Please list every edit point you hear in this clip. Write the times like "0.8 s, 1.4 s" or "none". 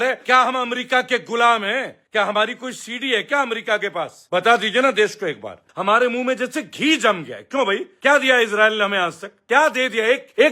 5.7 s